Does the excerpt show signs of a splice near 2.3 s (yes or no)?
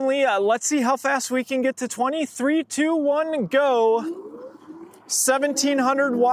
no